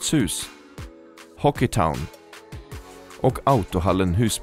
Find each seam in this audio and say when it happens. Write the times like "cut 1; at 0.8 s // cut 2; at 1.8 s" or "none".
none